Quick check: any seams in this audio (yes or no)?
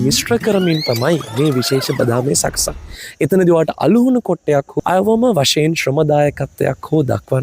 yes